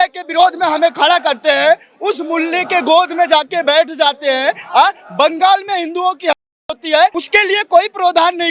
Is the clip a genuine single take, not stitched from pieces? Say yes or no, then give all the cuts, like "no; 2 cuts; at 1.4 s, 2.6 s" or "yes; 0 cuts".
no; 1 cut; at 7.2 s